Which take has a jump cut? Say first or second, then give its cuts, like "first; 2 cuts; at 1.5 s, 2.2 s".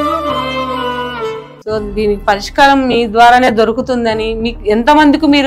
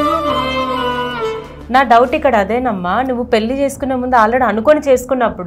first; 1 cut; at 1.5 s